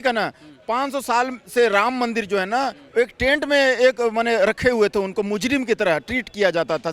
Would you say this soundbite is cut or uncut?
uncut